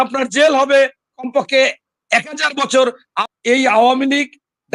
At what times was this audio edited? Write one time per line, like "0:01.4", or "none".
0:03.1